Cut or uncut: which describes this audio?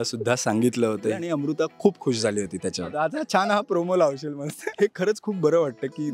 cut